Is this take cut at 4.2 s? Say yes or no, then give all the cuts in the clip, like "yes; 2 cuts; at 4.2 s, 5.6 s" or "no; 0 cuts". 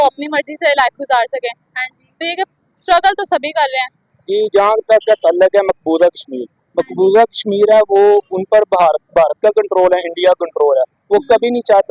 yes; 1 cut; at 4.2 s